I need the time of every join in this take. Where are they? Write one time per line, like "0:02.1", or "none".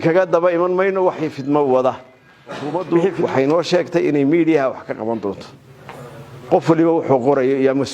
0:02.8